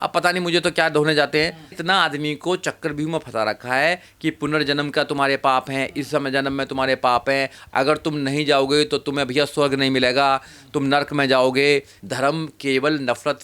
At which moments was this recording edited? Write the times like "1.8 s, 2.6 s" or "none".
12.0 s